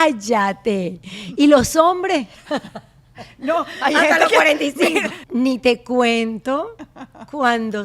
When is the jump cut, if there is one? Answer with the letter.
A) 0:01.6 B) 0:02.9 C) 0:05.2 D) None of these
C